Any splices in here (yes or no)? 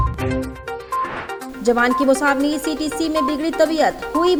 no